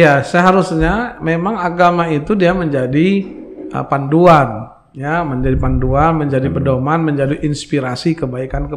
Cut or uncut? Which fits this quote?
uncut